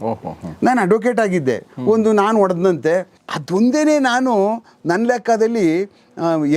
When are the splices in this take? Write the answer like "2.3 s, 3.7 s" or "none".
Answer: 3.2 s